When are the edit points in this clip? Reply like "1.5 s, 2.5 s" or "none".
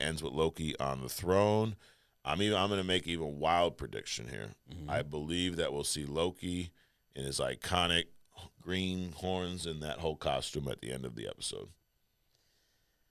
none